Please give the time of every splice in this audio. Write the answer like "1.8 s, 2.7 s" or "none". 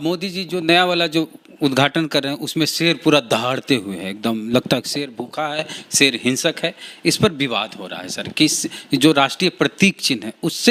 none